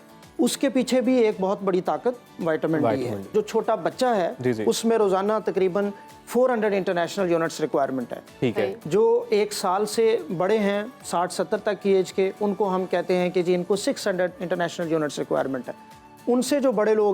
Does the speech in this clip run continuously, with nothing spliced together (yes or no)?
no